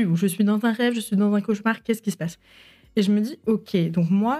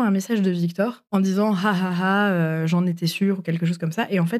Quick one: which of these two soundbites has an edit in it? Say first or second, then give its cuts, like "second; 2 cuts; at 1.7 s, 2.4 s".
second; 1 cut; at 1.0 s